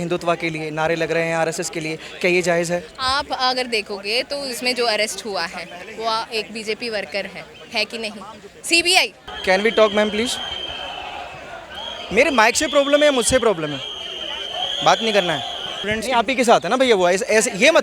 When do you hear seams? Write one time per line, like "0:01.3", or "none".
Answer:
0:09.2
0:15.8